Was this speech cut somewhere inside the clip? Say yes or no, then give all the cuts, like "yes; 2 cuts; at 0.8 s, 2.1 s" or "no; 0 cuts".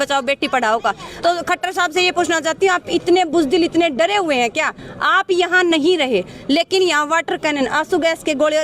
yes; 1 cut; at 1.1 s